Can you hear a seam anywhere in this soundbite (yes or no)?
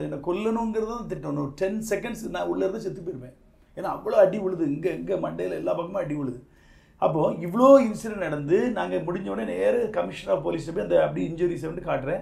no